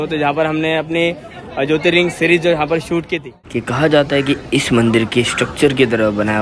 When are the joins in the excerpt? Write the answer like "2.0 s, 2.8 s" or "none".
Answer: 3.4 s